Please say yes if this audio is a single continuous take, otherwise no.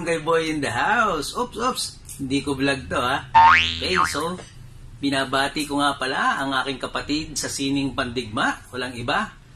yes